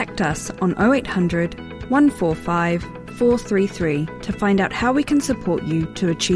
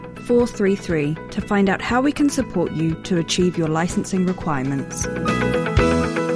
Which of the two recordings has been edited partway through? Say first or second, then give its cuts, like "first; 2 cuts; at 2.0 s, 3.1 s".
second; 1 cut; at 5.0 s